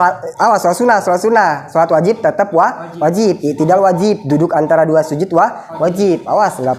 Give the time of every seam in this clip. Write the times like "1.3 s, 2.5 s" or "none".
none